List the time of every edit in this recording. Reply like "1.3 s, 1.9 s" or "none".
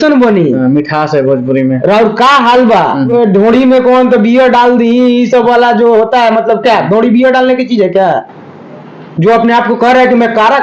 3.1 s, 8.8 s